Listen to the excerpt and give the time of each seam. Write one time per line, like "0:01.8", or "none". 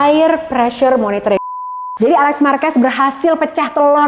0:01.5